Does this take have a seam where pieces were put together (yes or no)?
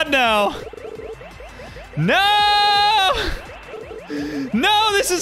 no